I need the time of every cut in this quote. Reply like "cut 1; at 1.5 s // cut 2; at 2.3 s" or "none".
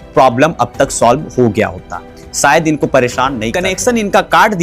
cut 1; at 3.5 s